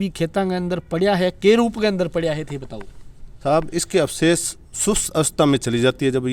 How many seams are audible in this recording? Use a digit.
0